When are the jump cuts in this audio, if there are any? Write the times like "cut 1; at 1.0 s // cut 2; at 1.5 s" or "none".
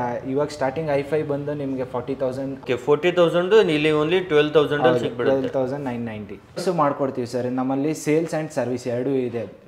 cut 1; at 2.6 s // cut 2; at 6.6 s